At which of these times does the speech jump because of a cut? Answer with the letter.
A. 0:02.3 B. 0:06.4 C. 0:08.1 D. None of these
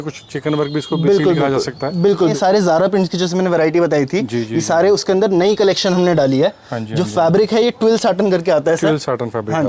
A